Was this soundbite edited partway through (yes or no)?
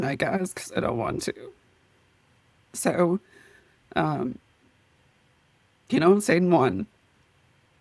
yes